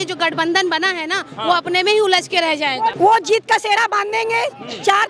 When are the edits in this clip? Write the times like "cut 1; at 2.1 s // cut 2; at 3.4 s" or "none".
cut 1; at 2.9 s